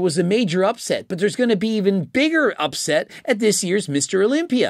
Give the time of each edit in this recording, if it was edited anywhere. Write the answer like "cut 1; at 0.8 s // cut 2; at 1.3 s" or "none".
none